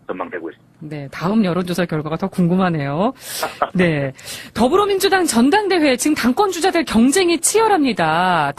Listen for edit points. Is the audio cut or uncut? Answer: cut